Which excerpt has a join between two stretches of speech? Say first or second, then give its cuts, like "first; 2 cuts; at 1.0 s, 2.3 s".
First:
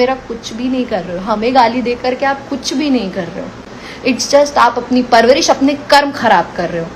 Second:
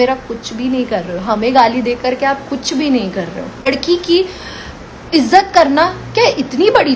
second; 1 cut; at 3.6 s